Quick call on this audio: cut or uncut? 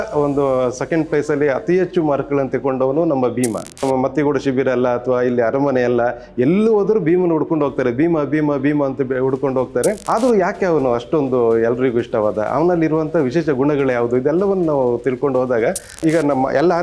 cut